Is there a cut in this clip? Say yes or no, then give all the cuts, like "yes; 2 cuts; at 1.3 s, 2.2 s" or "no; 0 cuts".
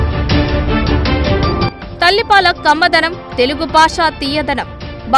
yes; 1 cut; at 1.5 s